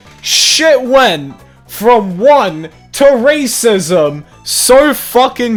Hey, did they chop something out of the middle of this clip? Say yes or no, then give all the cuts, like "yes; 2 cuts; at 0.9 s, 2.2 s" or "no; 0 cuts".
no; 0 cuts